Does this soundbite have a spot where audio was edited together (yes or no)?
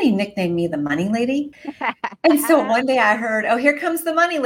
yes